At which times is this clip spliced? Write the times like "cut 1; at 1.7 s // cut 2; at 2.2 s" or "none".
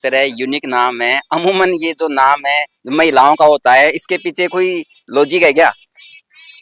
none